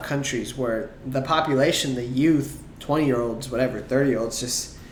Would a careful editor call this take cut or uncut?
uncut